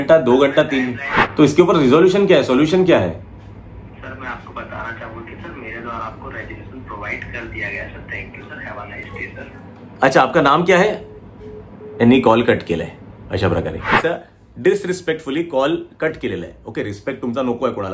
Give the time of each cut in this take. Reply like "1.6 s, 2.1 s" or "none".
1.2 s, 14.0 s